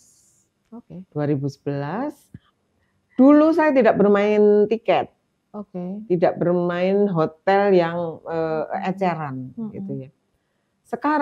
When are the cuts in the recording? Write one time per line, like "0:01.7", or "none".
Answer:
none